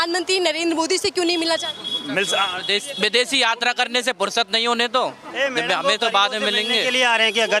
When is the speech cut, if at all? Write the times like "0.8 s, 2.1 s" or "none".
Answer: none